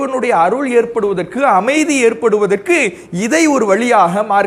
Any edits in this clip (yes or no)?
no